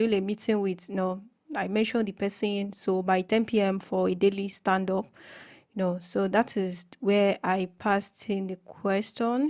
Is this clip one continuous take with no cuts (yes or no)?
yes